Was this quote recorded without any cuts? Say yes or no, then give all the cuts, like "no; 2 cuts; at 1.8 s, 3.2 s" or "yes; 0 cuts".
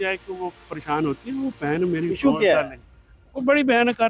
yes; 0 cuts